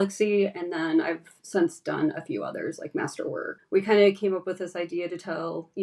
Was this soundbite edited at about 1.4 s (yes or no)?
no